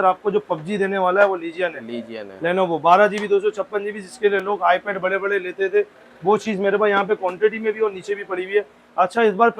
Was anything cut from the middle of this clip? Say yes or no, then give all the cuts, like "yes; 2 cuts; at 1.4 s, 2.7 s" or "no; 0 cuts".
no; 0 cuts